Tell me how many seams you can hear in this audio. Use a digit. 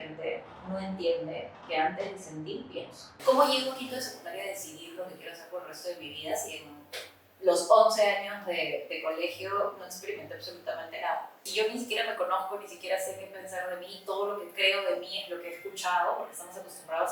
2